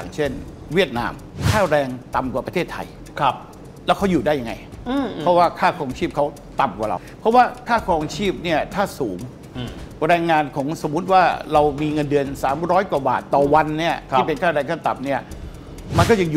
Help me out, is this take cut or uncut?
cut